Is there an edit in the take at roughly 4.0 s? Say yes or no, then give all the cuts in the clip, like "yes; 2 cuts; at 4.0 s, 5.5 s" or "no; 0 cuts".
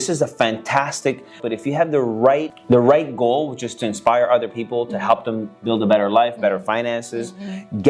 no; 2 cuts; at 1.4 s, 2.5 s